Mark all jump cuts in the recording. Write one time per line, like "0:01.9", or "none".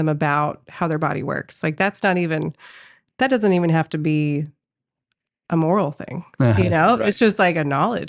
none